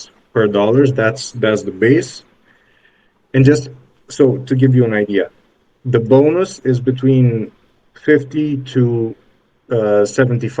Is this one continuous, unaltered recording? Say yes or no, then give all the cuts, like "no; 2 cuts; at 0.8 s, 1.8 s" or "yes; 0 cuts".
yes; 0 cuts